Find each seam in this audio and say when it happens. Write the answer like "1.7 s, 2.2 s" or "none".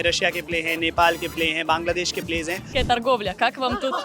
2.7 s